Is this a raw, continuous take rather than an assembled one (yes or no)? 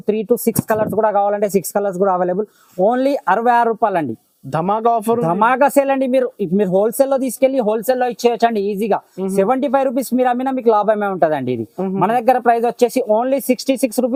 yes